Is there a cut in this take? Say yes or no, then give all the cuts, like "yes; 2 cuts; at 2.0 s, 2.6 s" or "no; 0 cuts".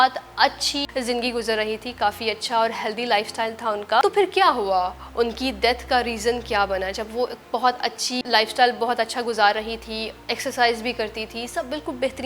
yes; 3 cuts; at 0.9 s, 4.0 s, 8.2 s